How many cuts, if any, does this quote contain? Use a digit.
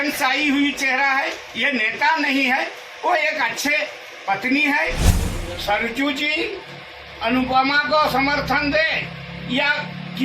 1